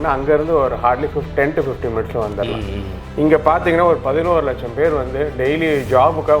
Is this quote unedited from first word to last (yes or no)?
no